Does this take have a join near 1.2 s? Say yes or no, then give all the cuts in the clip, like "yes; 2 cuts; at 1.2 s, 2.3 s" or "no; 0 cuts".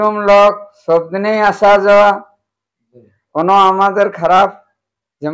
no; 0 cuts